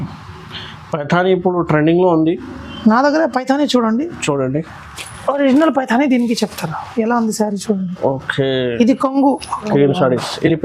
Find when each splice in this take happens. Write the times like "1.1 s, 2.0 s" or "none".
9.7 s